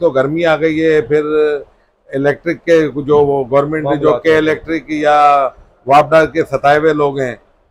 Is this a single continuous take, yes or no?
yes